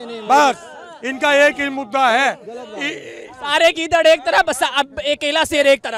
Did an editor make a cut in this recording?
no; 0 cuts

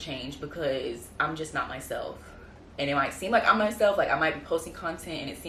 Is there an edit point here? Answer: no; 0 cuts

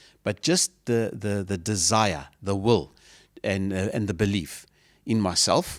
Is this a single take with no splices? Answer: yes; 0 cuts

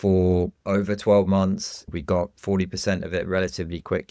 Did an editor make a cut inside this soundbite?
yes; 1 cut; at 1.9 s

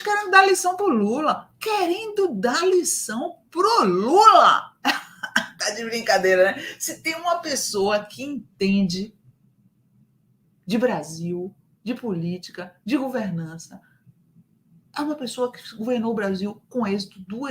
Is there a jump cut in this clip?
no; 0 cuts

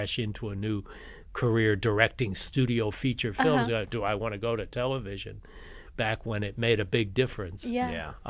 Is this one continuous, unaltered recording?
yes; 0 cuts

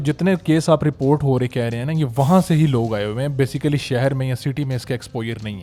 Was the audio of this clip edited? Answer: no; 0 cuts

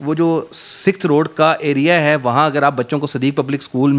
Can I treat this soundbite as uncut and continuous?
yes; 0 cuts

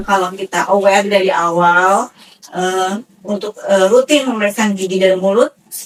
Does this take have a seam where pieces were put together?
no; 0 cuts

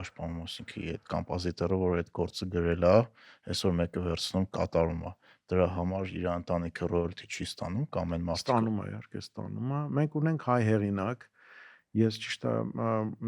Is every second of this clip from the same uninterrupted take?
yes; 0 cuts

